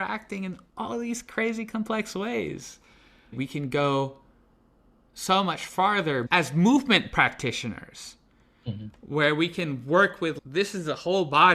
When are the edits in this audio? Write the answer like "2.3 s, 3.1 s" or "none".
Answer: 3.4 s, 6.3 s